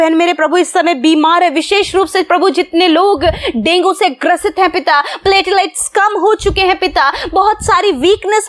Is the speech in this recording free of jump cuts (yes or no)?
yes